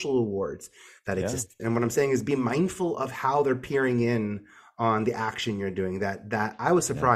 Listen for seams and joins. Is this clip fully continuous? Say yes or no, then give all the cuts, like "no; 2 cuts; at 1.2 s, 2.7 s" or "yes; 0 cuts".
no; 1 cut; at 1.5 s